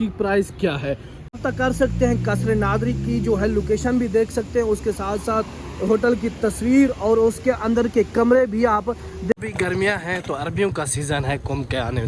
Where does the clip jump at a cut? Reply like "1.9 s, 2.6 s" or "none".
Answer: 1.3 s, 9.3 s